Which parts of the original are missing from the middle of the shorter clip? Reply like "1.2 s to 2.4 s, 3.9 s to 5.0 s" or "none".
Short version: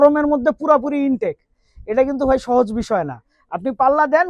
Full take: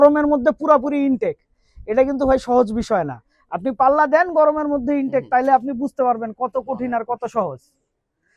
none